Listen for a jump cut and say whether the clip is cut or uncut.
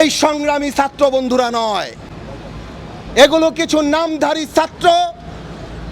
uncut